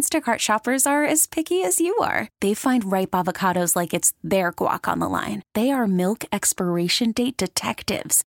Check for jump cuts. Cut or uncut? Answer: uncut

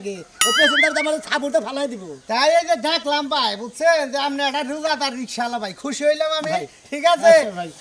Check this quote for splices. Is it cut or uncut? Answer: uncut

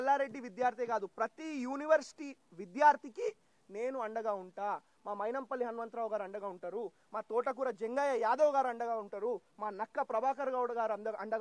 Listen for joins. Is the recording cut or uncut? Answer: uncut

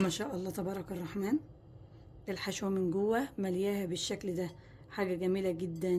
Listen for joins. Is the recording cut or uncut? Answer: uncut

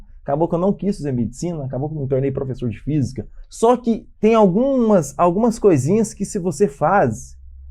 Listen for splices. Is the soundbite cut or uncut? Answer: cut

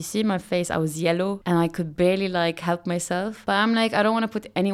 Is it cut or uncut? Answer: cut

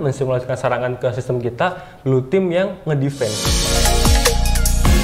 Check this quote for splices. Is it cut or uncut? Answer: cut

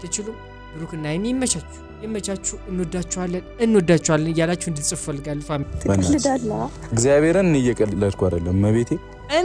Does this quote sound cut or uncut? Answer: cut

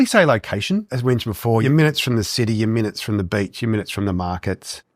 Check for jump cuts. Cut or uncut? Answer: cut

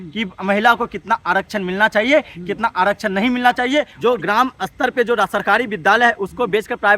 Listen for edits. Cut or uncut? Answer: cut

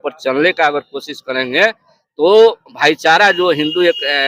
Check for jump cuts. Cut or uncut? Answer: uncut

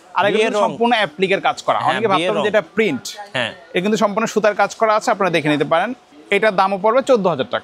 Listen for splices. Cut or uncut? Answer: uncut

